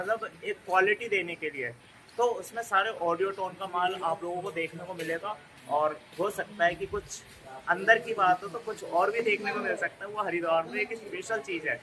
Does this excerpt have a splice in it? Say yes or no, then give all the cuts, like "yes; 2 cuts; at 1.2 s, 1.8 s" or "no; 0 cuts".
no; 0 cuts